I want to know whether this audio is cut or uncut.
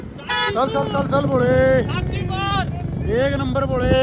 uncut